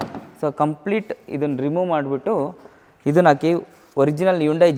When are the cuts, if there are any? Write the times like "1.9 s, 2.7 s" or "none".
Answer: none